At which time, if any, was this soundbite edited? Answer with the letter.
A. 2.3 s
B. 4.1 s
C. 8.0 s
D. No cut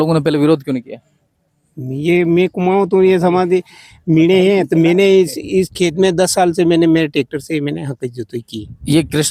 D